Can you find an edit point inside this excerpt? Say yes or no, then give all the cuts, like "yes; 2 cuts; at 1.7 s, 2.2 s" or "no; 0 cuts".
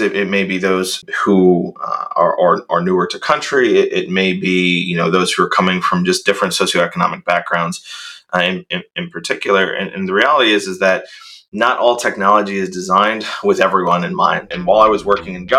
yes; 2 cuts; at 1.0 s, 14.2 s